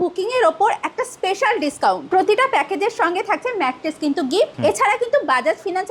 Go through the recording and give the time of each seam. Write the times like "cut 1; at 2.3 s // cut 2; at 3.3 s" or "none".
cut 1; at 2.0 s // cut 2; at 4.5 s